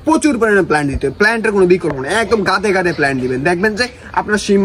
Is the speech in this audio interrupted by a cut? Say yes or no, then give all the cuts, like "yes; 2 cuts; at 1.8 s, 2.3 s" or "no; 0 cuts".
no; 0 cuts